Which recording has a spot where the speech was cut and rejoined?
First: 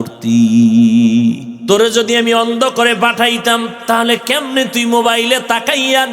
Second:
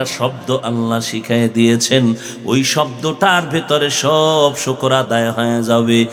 first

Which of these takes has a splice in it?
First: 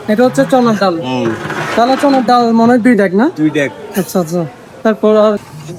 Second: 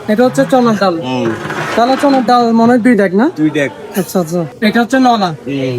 second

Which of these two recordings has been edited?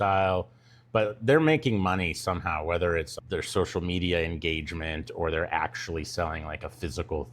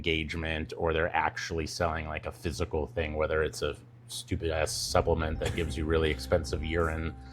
first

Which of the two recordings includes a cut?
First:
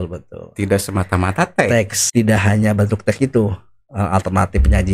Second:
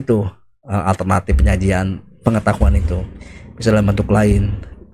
first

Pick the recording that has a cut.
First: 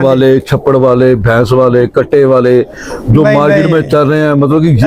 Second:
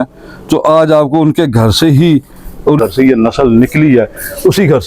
second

